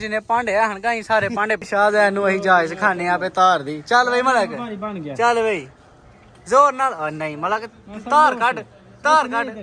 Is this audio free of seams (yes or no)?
no